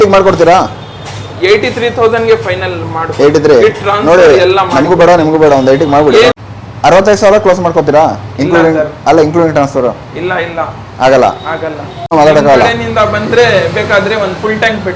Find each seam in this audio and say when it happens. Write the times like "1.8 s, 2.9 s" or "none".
6.3 s, 12.1 s

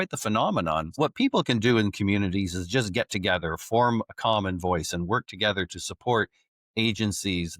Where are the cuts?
1.0 s

